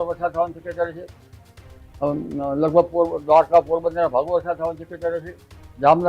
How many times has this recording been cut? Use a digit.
0